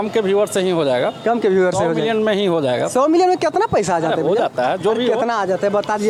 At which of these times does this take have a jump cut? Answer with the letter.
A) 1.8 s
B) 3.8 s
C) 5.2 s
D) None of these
D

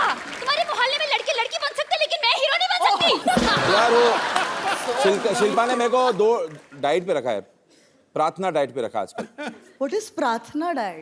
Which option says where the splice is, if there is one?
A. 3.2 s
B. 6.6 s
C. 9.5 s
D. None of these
A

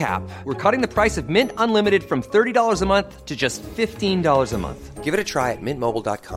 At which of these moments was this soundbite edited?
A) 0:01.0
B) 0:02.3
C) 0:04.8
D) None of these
D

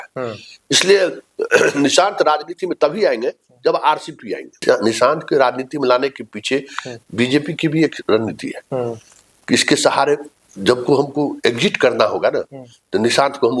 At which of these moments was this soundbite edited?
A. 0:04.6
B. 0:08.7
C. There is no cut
A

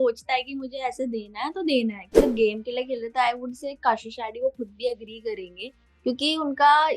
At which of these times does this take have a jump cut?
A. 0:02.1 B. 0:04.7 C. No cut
A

